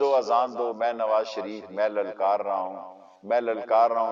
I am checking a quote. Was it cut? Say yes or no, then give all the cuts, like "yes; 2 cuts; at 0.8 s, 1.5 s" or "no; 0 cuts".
no; 0 cuts